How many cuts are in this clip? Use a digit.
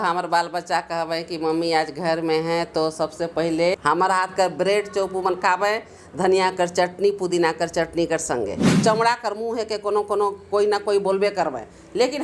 2